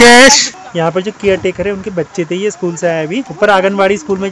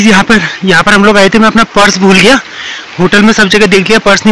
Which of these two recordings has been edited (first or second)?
first